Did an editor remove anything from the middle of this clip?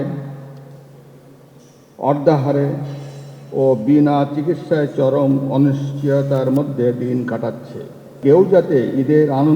yes; 1 cut; at 8.1 s

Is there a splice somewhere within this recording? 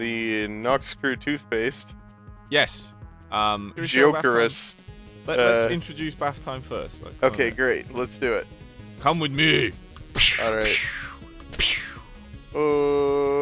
no; 0 cuts

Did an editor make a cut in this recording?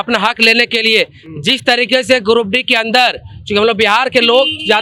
no; 0 cuts

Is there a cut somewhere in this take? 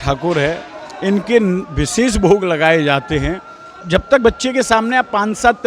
yes; 1 cut; at 3.7 s

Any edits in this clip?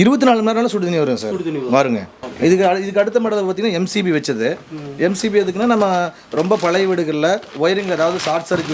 no; 0 cuts

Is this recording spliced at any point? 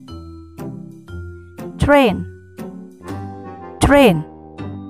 yes; 2 cuts; at 2.2 s, 3.8 s

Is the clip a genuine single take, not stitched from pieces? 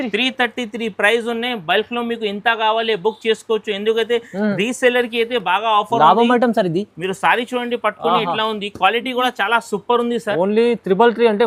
yes; 0 cuts

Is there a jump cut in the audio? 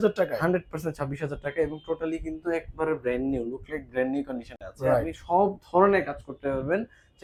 no; 0 cuts

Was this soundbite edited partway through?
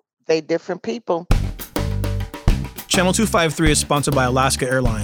yes; 1 cut; at 1.3 s

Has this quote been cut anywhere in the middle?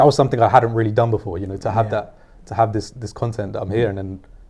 no; 0 cuts

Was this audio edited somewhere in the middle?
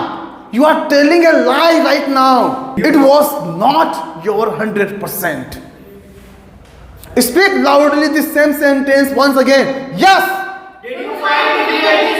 yes; 1 cut; at 2.7 s

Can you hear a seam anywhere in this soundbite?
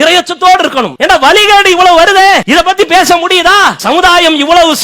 yes; 3 cuts; at 0.9 s, 2.4 s, 3.8 s

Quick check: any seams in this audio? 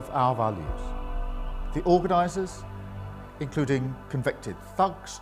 no; 0 cuts

